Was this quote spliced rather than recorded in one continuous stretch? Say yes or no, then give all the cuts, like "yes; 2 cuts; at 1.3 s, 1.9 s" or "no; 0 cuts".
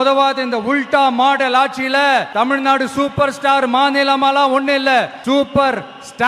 yes; 2 cuts; at 2.3 s, 5.1 s